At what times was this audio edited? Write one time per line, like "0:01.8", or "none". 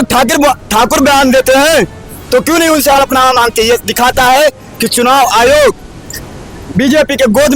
none